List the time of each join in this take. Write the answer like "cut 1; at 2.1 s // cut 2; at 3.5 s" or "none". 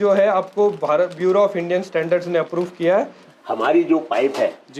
cut 1; at 3.2 s